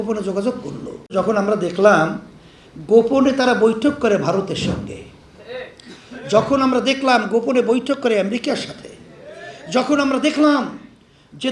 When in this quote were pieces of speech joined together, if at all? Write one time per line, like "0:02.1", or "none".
0:01.1